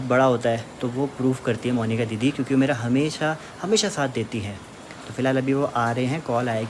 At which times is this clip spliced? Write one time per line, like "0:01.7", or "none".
none